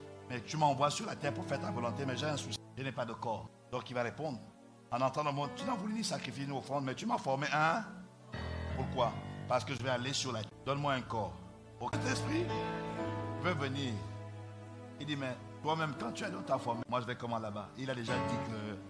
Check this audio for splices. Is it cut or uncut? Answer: cut